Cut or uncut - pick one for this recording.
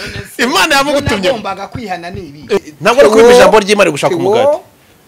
cut